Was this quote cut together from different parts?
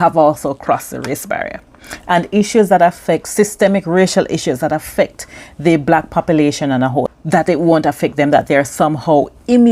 yes; 1 cut; at 7.1 s

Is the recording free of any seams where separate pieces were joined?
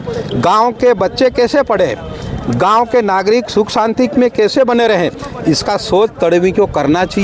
yes; 0 cuts

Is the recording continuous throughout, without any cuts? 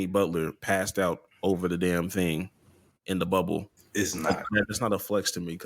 no; 1 cut; at 3.8 s

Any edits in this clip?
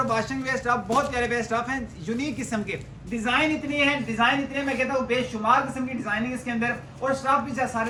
no; 0 cuts

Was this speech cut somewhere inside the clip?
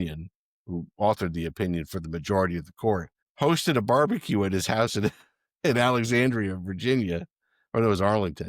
yes; 1 cut; at 3.2 s

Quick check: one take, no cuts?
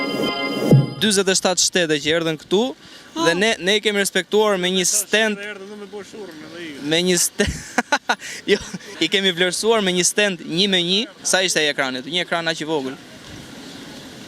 no; 1 cut; at 0.9 s

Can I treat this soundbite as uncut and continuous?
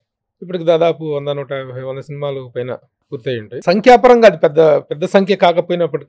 no; 1 cut; at 3.5 s

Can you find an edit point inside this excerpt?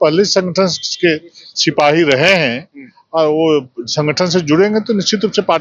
no; 0 cuts

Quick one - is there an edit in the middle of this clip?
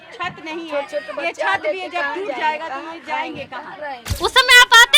yes; 1 cut; at 4.0 s

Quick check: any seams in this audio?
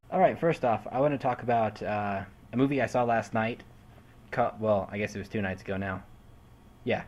no; 0 cuts

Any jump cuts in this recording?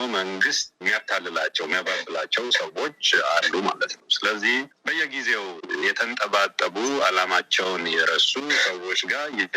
no; 0 cuts

